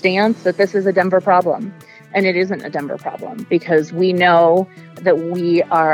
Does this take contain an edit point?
yes; 1 cut; at 4.9 s

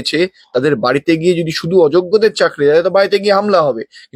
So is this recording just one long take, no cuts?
yes; 0 cuts

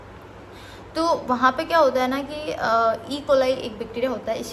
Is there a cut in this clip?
no; 0 cuts

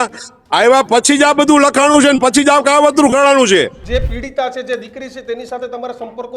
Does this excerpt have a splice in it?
yes; 1 cut; at 3.8 s

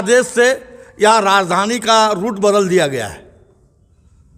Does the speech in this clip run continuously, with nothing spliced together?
yes; 0 cuts

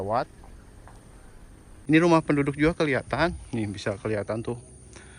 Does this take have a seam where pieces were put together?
yes; 1 cut; at 1.7 s

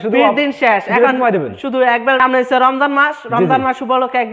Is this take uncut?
no; 1 cut; at 2.2 s

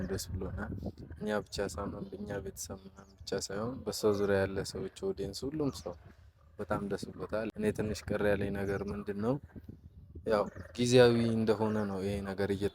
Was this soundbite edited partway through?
yes; 1 cut; at 7.5 s

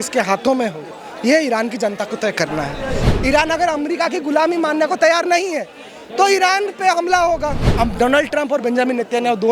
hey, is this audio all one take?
no; 2 cuts; at 3.0 s, 7.7 s

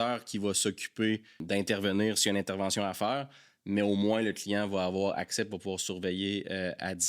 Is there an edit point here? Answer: yes; 1 cut; at 1.4 s

